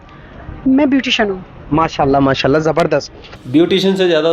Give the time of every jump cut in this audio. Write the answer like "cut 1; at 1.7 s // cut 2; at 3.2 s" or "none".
none

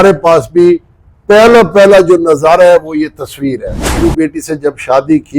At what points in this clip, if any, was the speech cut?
cut 1; at 4.0 s

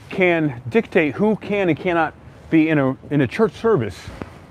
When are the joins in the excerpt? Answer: none

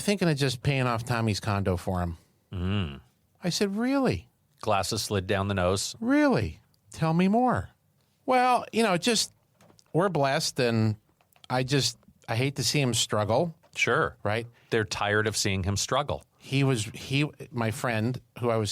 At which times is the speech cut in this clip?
cut 1; at 13.7 s

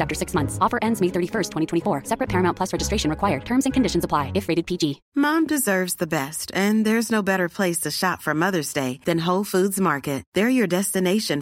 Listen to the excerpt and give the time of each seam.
cut 1; at 5.0 s

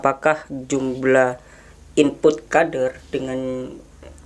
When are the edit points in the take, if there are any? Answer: none

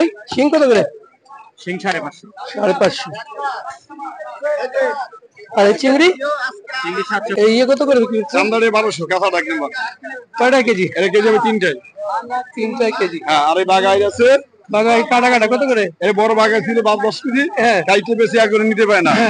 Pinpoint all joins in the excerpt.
cut 1; at 7.2 s

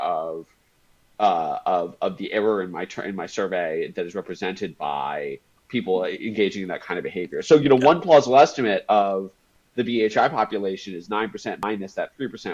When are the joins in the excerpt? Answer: cut 1; at 11.6 s

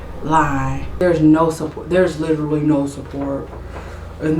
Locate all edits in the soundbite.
cut 1; at 1.0 s

